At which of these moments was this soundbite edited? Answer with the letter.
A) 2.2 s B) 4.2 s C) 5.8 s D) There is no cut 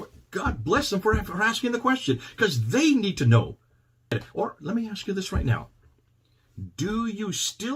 B